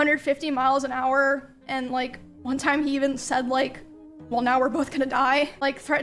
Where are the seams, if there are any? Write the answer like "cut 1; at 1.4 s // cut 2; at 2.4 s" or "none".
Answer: none